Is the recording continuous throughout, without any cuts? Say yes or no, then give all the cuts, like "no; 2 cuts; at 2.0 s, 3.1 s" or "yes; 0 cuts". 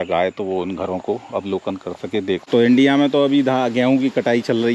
no; 1 cut; at 2.5 s